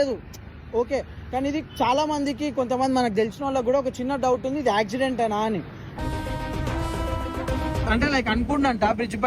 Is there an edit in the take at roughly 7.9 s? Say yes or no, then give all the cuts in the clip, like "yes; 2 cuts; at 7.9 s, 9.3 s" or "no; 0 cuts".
yes; 1 cut; at 7.9 s